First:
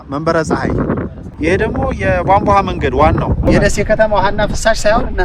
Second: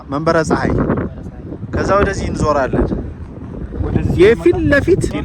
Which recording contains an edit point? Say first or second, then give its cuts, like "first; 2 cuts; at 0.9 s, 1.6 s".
first; 2 cuts; at 1.3 s, 3.5 s